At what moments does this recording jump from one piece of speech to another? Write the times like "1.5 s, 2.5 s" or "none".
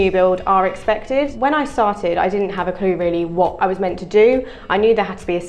1.3 s, 3.5 s